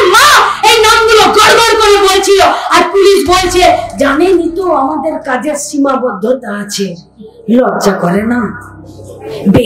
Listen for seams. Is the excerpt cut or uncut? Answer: uncut